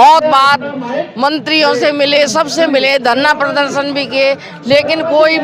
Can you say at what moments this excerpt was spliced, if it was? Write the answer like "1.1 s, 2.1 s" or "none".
none